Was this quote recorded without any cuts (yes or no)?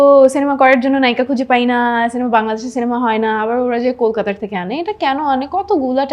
yes